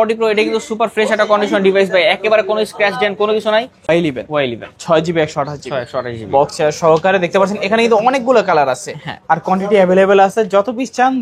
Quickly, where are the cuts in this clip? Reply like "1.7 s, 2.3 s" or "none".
3.9 s